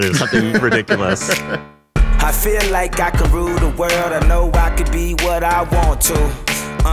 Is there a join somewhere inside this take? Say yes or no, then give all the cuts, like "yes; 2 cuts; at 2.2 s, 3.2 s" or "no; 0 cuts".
yes; 1 cut; at 1.5 s